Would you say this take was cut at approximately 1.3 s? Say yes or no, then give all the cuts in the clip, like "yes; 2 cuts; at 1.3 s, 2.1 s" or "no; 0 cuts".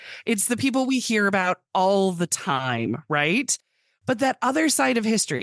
no; 0 cuts